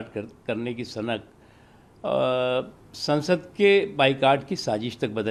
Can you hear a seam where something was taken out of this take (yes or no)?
no